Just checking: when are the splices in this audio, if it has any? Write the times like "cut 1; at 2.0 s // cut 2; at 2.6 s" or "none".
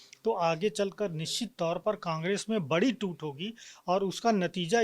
none